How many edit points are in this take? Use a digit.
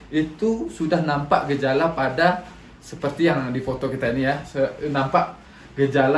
0